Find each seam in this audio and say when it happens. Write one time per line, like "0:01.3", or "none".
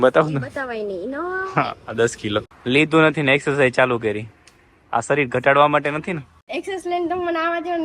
0:02.5
0:06.3